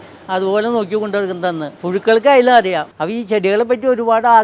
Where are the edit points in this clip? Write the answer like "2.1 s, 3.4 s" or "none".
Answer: 1.7 s, 3.0 s